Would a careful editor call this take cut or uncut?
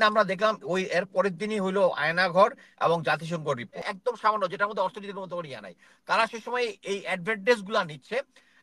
cut